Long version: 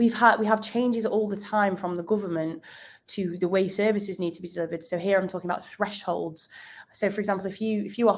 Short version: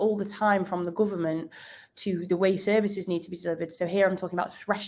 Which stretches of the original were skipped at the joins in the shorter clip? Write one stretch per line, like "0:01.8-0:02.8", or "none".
none